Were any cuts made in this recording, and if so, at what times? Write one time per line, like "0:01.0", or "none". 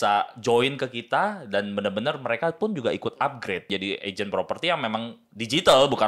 0:03.7